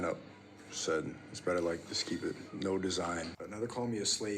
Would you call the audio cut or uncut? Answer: cut